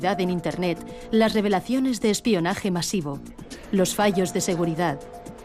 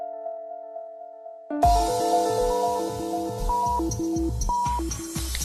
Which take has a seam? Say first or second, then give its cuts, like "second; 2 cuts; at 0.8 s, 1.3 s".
second; 1 cut; at 1.4 s